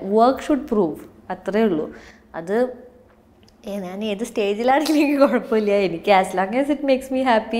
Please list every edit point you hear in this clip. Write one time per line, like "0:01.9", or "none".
none